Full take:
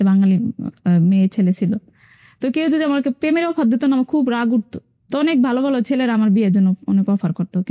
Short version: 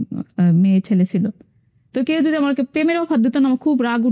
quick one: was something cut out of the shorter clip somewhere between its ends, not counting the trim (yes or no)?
no